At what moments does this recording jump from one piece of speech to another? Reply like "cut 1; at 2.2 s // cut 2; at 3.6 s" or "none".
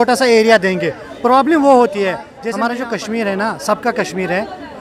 cut 1; at 2.4 s